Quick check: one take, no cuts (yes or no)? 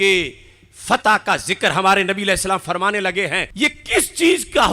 no